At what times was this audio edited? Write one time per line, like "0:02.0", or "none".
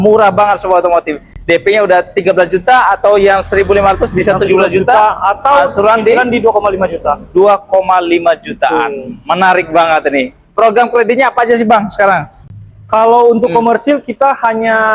none